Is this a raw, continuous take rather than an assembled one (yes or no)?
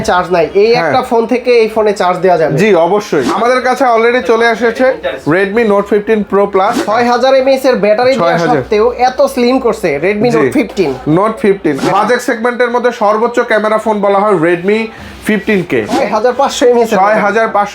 no